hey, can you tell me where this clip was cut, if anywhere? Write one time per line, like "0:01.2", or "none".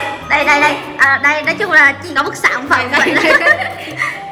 0:02.1